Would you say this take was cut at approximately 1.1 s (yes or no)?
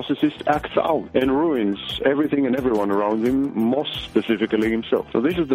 yes